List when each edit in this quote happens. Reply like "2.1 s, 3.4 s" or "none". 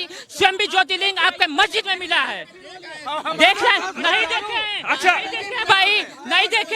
none